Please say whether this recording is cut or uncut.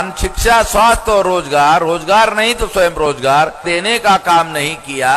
cut